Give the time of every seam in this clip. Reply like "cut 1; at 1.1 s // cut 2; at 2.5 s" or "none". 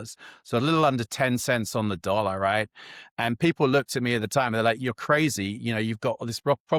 none

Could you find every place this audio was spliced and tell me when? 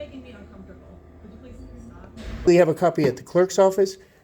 cut 1; at 2.5 s

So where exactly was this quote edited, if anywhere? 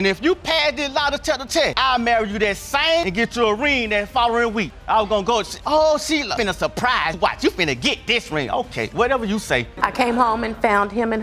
cut 1; at 9.7 s

